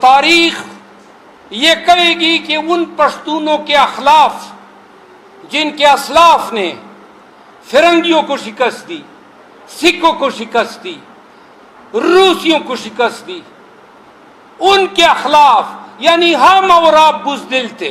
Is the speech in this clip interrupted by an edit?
no; 0 cuts

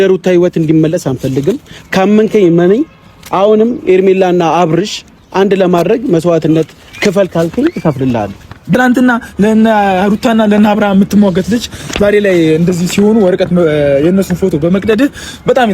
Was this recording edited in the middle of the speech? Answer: yes; 1 cut; at 8.6 s

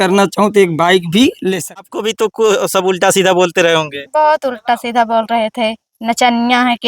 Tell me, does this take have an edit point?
yes; 1 cut; at 1.9 s

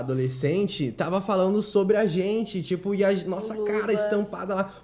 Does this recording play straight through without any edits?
yes; 0 cuts

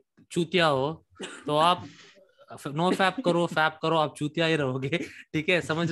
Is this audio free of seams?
yes; 0 cuts

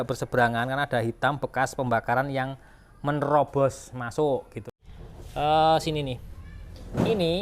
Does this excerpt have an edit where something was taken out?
yes; 1 cut; at 4.8 s

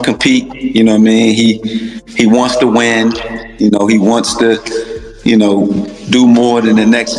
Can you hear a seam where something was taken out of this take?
no; 0 cuts

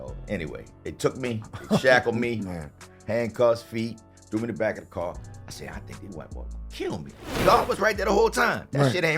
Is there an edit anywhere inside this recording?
yes; 1 cut; at 7.4 s

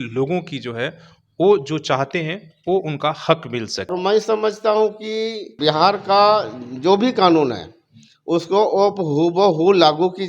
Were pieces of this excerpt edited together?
yes; 2 cuts; at 3.9 s, 5.5 s

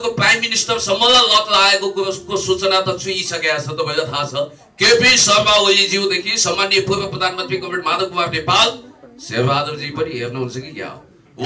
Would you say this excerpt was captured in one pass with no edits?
yes; 0 cuts

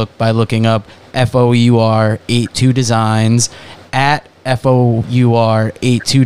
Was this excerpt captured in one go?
no; 1 cut; at 5.0 s

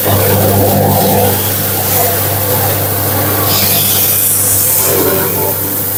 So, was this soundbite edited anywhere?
no; 0 cuts

